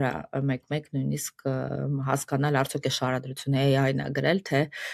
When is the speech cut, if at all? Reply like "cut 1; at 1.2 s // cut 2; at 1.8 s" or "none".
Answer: none